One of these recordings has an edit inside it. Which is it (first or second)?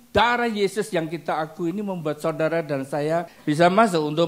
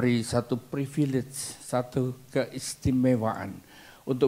first